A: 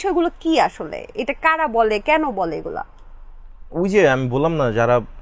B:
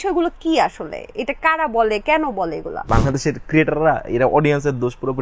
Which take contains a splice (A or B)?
B